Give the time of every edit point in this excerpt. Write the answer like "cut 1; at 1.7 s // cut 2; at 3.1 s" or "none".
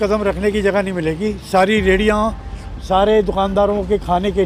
none